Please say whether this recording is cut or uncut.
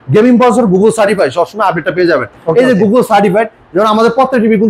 uncut